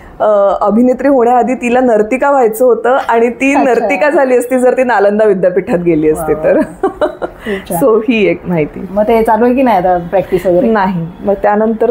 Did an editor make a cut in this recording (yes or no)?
no